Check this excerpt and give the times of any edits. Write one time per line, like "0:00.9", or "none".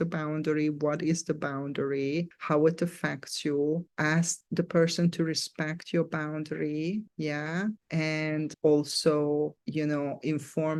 none